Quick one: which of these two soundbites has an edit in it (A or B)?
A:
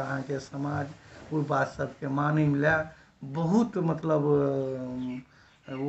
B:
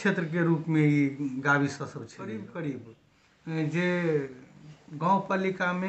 B